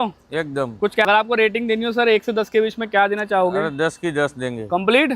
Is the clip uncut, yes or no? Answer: no